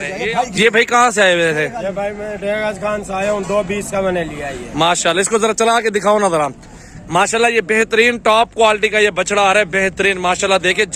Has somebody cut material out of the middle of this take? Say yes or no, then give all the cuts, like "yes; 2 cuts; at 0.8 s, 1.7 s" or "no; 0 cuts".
no; 0 cuts